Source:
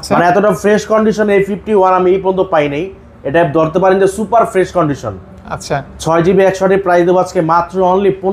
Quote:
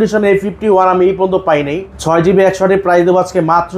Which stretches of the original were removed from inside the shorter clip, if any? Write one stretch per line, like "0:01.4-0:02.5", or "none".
0:03.0-0:05.9